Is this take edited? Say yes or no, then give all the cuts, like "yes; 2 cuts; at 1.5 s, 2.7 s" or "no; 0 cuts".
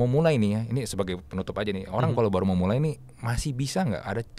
no; 0 cuts